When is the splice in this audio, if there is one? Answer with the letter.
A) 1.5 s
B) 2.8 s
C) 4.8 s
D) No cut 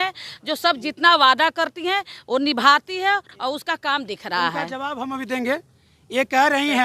D